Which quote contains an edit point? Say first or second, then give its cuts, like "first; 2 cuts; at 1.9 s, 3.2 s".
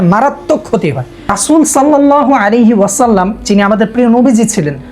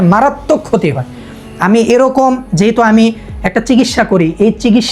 first; 1 cut; at 1.4 s